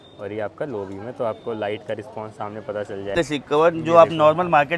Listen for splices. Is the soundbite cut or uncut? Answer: cut